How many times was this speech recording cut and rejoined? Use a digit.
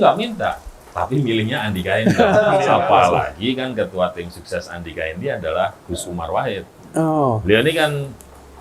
1